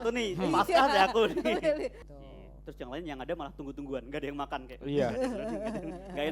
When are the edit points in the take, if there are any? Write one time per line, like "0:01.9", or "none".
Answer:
0:02.0

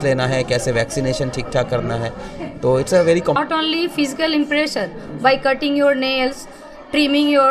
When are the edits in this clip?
0:03.4

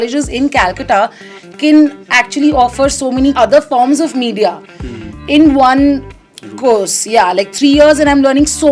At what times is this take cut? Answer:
0:03.4

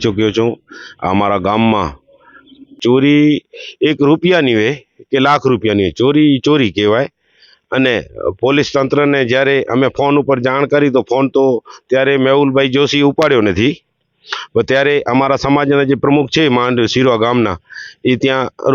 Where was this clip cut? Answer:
0:02.7

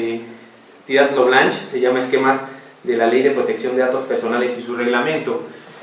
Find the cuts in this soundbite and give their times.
none

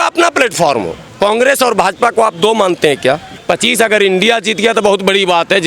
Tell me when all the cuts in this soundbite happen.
0:01.0
0:03.3

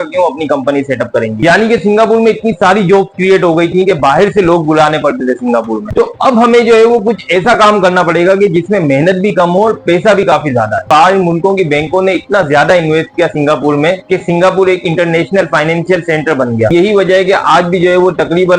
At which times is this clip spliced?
0:01.4
0:05.8
0:10.8
0:16.7

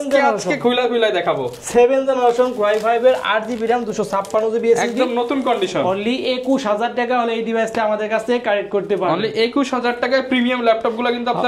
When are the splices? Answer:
none

